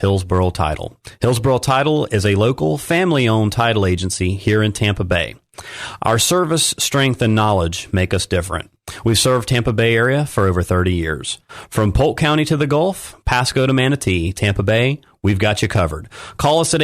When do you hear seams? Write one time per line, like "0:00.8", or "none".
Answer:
none